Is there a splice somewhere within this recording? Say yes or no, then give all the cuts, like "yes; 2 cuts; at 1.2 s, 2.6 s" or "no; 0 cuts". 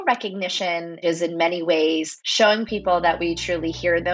yes; 2 cuts; at 1.0 s, 2.2 s